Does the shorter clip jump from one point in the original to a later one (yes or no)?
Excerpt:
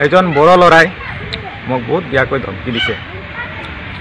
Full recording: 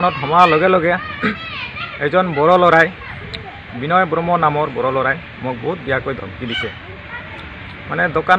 yes